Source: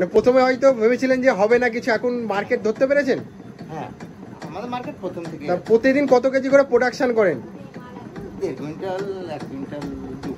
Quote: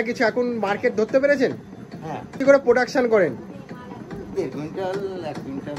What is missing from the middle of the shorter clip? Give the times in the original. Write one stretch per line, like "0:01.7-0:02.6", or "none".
0:04.1-0:06.5